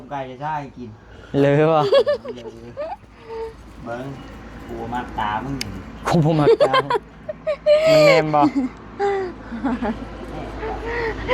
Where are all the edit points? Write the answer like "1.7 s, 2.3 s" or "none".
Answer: none